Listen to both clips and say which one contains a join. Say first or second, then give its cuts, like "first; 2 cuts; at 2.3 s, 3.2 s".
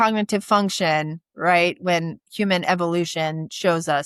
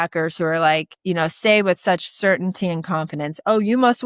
second; 1 cut; at 0.9 s